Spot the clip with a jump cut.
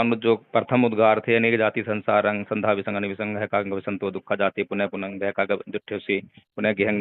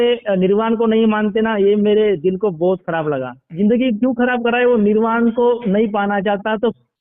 second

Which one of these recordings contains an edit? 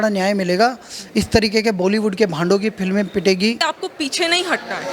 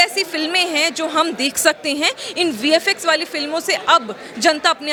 first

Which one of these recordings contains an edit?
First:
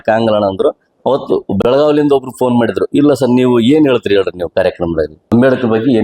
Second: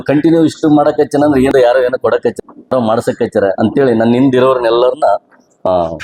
first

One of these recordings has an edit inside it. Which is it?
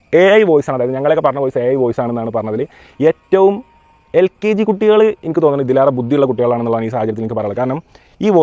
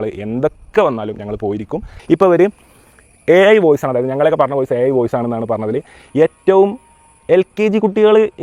second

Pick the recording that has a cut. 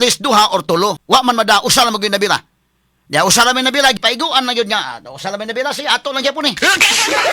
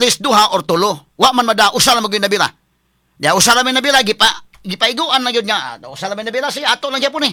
first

